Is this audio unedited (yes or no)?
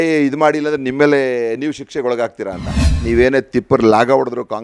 no